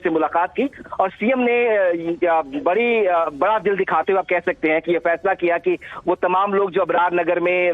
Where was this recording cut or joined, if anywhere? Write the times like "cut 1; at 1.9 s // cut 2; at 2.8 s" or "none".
cut 1; at 6.7 s